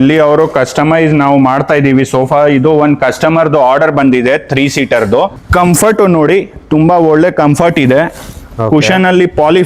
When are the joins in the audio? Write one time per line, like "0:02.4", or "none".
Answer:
0:05.4

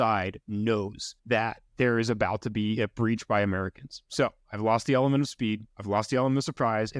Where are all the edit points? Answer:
0:01.4
0:05.7

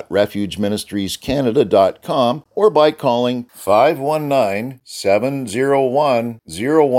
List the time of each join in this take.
0:02.4

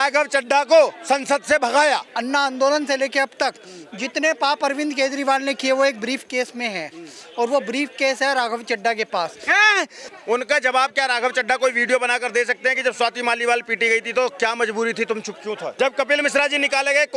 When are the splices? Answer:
0:02.1
0:10.0
0:15.7

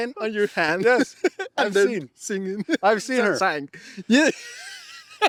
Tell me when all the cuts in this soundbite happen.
none

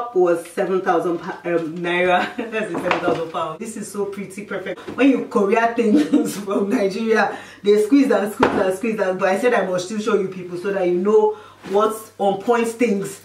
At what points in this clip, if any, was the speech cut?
0:03.6
0:04.8

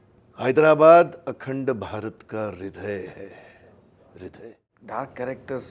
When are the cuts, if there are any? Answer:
0:04.7

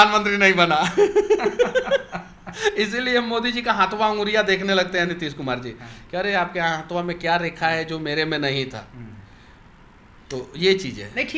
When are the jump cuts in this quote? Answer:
none

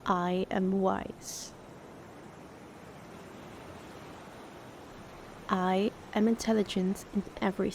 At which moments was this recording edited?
0:01.5
0:05.5

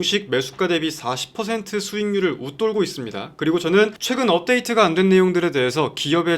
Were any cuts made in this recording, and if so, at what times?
0:04.0

